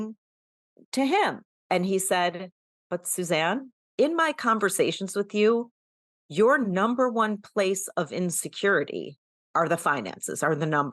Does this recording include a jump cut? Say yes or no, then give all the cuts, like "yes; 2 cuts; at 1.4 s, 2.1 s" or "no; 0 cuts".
yes; 3 cuts; at 1.5 s, 3.8 s, 9.3 s